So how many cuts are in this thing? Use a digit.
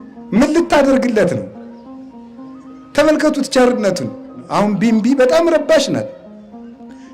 1